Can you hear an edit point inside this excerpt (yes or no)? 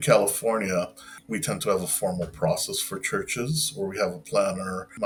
no